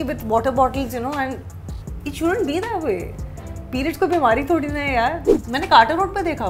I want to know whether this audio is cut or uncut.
cut